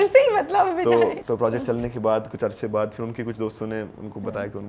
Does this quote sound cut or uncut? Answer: cut